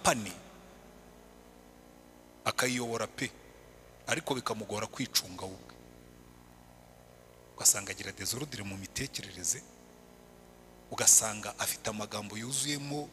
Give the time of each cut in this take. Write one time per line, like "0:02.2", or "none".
none